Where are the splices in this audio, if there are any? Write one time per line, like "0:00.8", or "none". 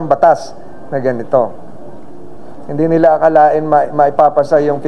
none

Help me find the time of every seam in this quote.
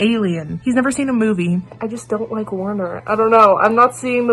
0:01.7

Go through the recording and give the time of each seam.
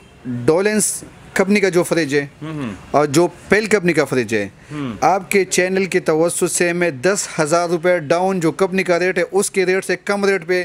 none

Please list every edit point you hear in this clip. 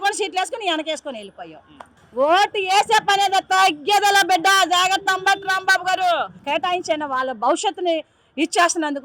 0:02.0
0:06.4

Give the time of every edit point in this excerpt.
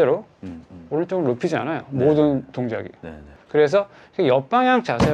0:03.3

